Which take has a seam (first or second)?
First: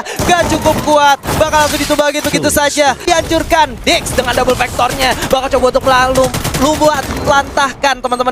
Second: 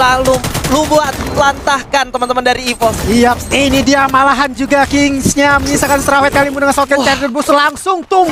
first